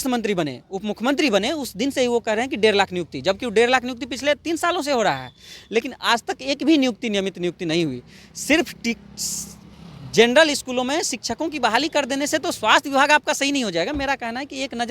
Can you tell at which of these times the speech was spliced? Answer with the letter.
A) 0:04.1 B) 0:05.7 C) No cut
C